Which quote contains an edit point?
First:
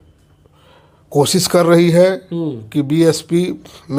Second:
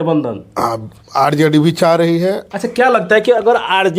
second; 1 cut; at 2.4 s

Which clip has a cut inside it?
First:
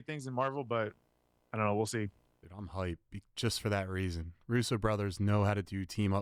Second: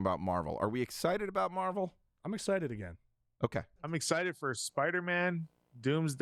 second; 1 cut; at 3.8 s

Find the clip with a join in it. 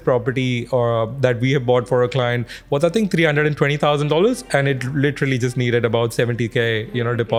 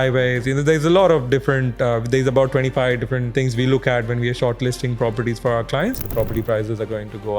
second; 2 cuts; at 3.2 s, 6.1 s

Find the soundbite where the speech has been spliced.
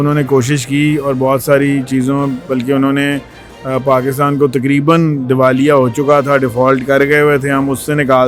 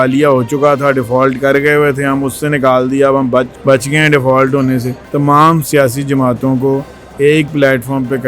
second; 1 cut; at 5.0 s

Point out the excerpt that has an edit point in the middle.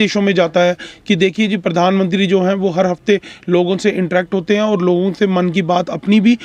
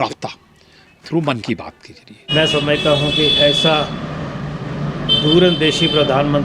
second; 1 cut; at 2.2 s

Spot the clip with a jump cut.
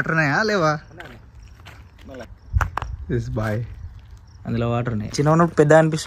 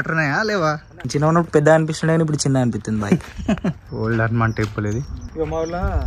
second; 3 cuts; at 1.0 s, 3.8 s, 5.2 s

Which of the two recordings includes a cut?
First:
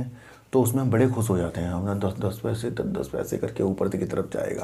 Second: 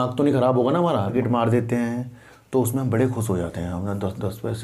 second; 1 cut; at 1.1 s

